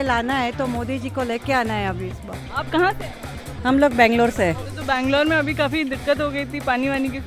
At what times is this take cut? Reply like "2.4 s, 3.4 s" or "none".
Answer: none